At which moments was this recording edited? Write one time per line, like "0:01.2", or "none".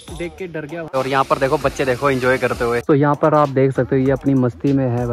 0:01.0
0:02.8